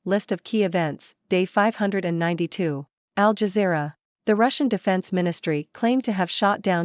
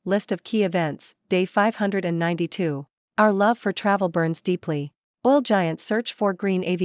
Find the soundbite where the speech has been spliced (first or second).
second